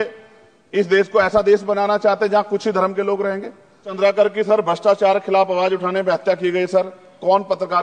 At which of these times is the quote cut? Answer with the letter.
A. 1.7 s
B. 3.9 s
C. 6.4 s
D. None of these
B